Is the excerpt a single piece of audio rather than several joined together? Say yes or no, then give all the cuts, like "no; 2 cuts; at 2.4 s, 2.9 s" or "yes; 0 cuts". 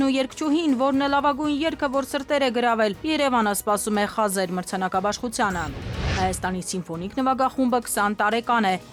yes; 0 cuts